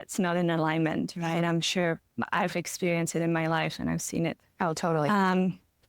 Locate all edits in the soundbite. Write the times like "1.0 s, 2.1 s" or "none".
none